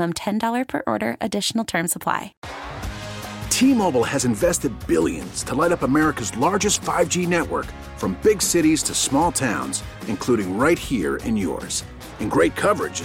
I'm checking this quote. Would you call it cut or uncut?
cut